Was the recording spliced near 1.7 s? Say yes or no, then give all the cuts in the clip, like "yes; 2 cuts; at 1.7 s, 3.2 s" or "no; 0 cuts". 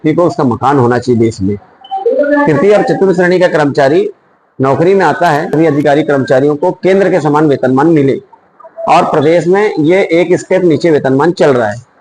no; 1 cut; at 5.5 s